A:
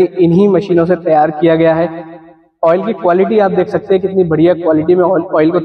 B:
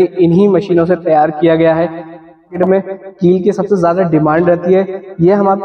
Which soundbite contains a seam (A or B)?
B